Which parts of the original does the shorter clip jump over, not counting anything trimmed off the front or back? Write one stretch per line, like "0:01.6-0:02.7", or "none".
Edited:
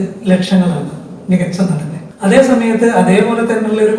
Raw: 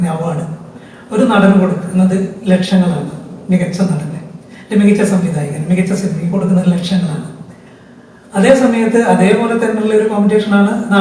0:04.2-0:08.1